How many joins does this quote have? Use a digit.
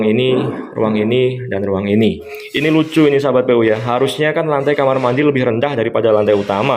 1